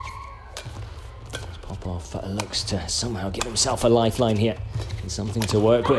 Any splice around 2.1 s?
no; 0 cuts

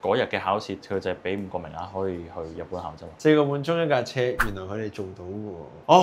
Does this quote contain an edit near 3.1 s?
yes; 1 cut; at 3.1 s

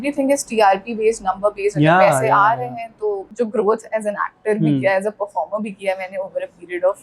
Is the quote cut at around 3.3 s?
yes; 1 cut; at 3.3 s

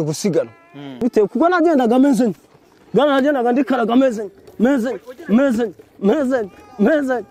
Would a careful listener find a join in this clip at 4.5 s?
no; 1 cut; at 1.0 s

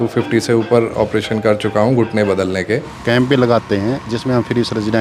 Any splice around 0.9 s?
no; 1 cut; at 2.9 s

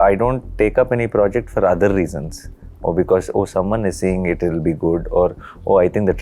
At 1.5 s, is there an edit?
no; 0 cuts

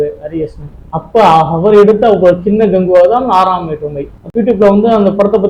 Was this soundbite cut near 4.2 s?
yes; 1 cut; at 4.2 s

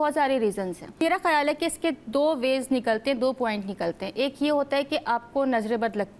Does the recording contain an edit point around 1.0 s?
yes; 1 cut; at 1.0 s

